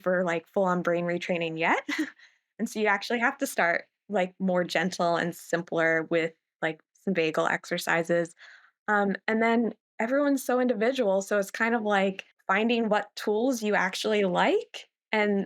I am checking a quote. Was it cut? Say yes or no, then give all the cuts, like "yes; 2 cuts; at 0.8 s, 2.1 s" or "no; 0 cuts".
no; 0 cuts